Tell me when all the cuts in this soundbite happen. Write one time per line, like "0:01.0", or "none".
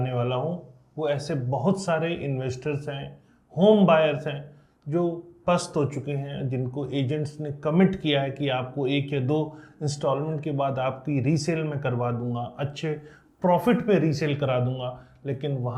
none